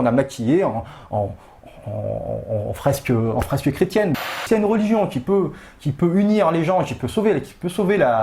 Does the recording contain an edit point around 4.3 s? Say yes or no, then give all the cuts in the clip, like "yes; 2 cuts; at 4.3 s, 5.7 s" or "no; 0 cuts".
yes; 1 cut; at 4.3 s